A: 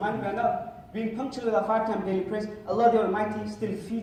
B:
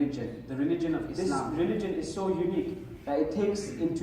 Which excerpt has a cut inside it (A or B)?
B